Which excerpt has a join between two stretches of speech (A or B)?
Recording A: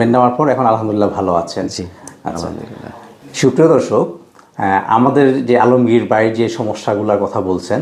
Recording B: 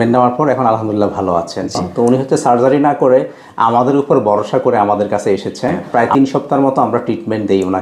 B